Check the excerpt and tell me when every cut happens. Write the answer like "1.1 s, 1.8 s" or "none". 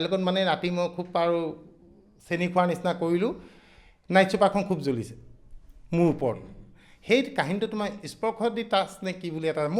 none